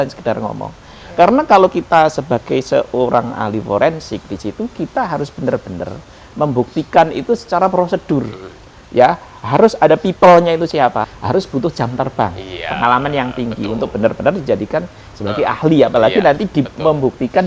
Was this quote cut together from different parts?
yes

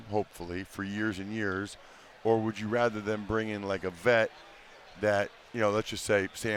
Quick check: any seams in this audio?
no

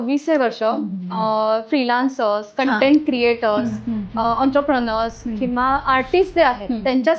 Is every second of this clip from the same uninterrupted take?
yes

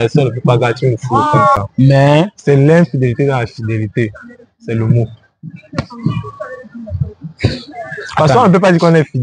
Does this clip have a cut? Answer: yes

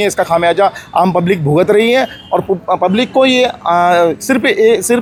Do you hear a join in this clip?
no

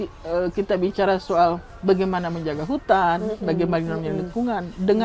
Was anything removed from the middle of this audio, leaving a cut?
yes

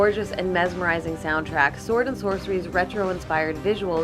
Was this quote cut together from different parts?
yes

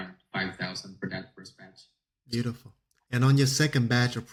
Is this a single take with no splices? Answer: yes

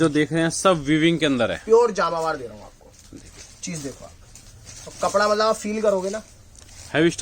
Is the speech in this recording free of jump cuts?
yes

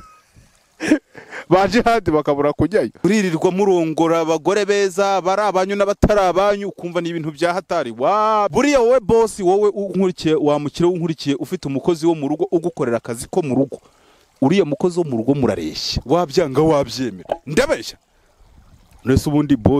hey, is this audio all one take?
no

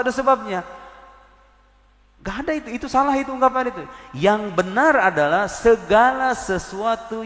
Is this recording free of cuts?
yes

